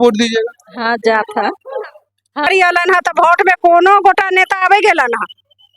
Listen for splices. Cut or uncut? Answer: cut